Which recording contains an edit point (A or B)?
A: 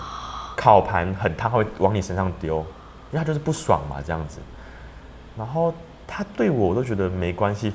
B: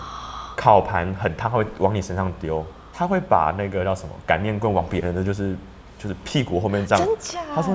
B